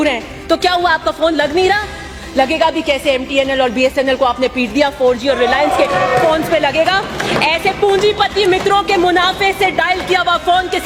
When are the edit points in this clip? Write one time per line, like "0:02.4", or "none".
none

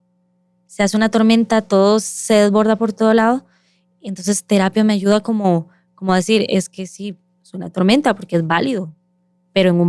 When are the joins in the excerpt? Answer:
none

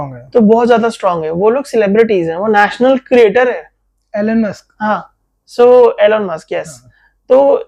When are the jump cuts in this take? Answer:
none

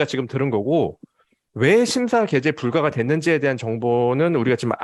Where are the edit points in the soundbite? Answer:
none

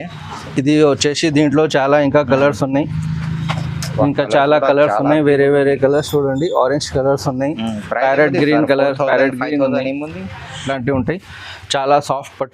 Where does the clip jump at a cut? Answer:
0:10.7

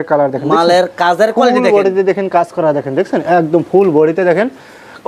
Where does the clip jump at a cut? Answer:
none

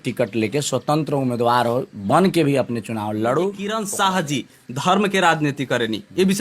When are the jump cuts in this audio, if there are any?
0:03.6

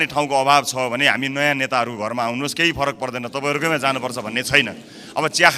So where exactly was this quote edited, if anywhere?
none

